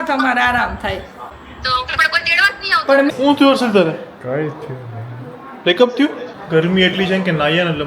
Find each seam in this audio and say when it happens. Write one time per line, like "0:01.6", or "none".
0:03.1
0:06.3